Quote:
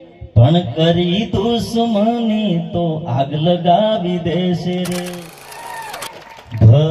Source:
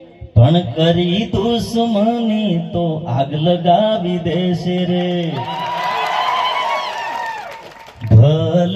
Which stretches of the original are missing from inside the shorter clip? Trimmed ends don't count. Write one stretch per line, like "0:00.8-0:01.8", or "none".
0:05.4-0:06.9

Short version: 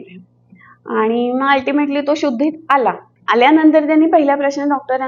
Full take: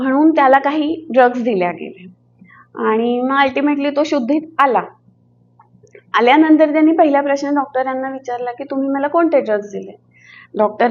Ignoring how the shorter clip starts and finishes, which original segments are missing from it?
0:05.0-0:06.0

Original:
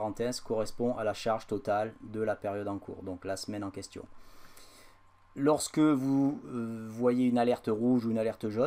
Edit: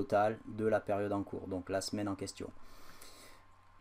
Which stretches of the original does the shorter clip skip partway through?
none

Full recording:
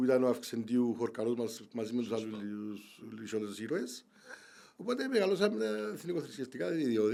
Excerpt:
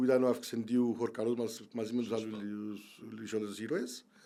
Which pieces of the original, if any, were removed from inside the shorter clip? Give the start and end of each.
none

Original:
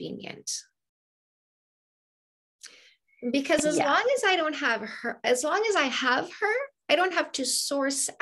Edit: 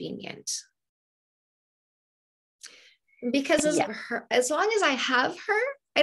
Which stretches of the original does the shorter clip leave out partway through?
0:03.9-0:04.8

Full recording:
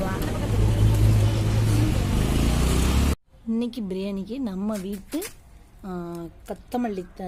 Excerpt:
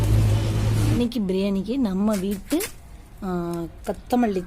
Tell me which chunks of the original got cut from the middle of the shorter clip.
0:01.9-0:03.6

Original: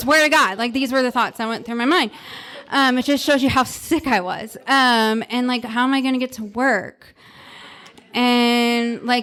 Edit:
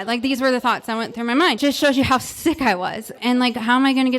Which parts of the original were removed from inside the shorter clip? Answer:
0:02.1-0:03.0
0:04.6-0:05.3

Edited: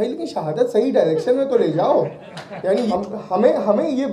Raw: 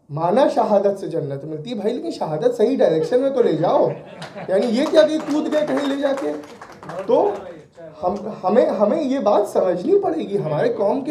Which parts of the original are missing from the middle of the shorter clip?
0:04.7-0:08.0

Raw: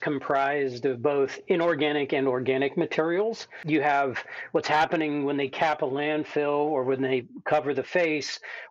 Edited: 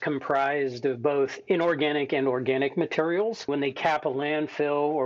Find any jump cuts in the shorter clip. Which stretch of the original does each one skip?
0:03.5-0:05.2

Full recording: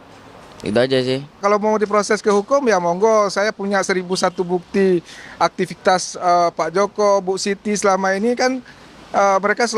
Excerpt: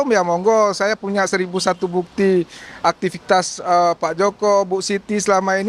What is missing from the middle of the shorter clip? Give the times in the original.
none

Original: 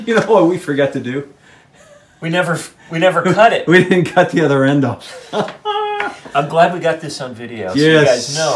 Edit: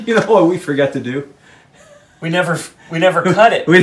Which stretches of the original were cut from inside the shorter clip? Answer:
none

